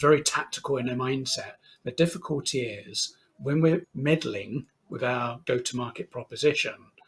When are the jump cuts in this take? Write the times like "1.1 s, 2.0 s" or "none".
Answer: 3.8 s